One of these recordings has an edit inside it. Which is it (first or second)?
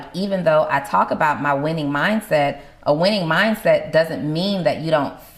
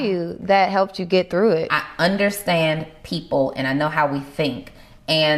second